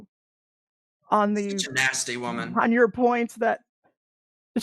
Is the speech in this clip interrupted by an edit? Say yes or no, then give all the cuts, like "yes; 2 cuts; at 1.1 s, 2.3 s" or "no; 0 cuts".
no; 0 cuts